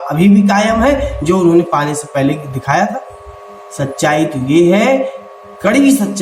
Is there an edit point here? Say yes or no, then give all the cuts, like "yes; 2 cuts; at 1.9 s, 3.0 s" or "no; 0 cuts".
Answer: no; 0 cuts